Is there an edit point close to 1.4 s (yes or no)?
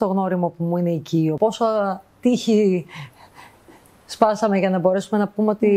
yes